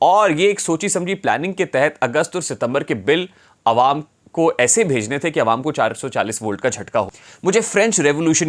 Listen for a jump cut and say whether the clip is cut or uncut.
cut